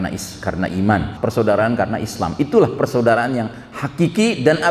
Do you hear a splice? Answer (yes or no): yes